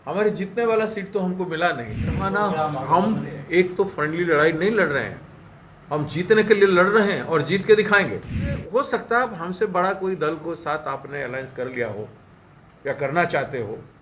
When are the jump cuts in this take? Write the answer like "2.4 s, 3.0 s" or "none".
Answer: 2.2 s, 8.6 s